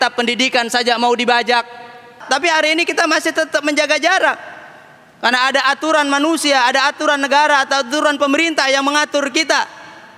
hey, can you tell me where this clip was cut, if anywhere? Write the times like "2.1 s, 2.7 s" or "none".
2.2 s

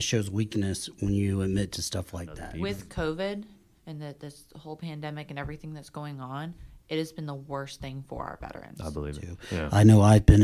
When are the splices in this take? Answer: 2.5 s, 9.4 s

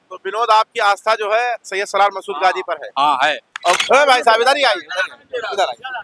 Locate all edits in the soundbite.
3.8 s

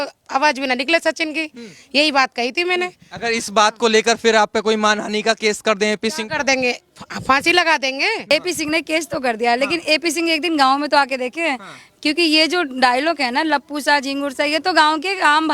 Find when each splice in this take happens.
8.3 s

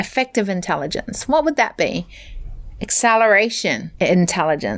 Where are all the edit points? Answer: 3.9 s

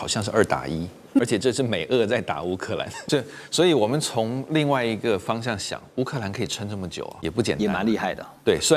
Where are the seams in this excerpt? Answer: 1.2 s, 2.9 s, 7.1 s

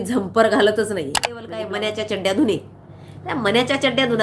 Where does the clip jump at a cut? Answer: 1.5 s

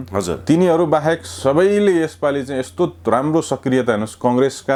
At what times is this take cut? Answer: none

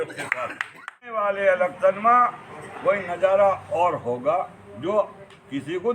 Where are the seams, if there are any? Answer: 1.1 s

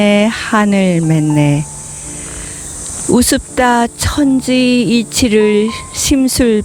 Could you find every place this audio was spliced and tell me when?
none

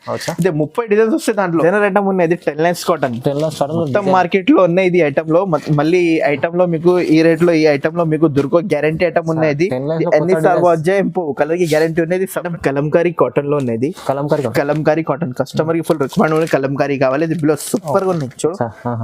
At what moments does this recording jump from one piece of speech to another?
1.6 s, 12.4 s

